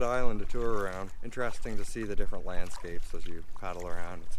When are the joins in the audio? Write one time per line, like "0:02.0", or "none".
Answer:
0:01.2

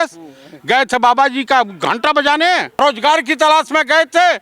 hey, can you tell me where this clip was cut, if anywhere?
0:02.8

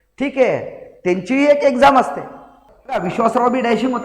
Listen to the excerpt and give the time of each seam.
0:03.1

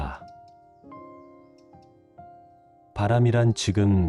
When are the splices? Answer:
none

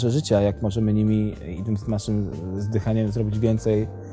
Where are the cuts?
none

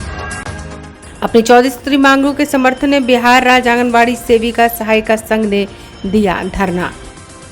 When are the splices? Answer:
0:00.9

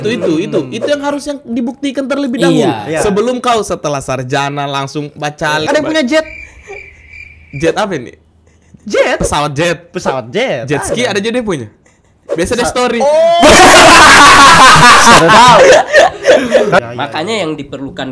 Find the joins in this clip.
0:05.6
0:16.8

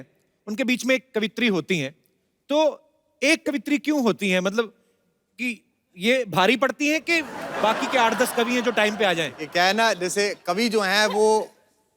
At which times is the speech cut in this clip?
none

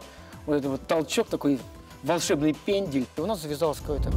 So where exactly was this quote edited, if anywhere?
0:03.2

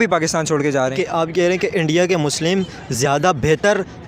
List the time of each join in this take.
0:00.9

